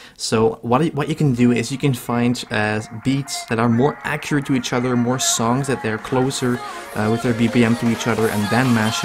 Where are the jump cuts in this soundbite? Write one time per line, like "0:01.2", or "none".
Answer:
none